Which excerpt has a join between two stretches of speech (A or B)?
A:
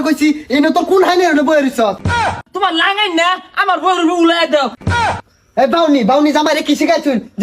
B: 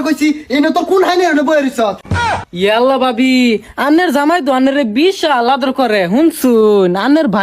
A